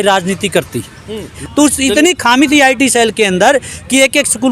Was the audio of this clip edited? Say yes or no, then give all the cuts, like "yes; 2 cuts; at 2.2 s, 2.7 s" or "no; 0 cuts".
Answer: yes; 1 cut; at 1.3 s